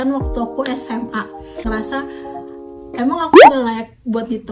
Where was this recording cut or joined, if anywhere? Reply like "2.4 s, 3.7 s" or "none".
1.7 s